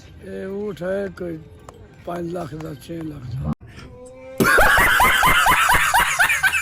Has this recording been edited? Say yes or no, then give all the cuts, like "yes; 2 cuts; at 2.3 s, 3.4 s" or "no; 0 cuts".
no; 0 cuts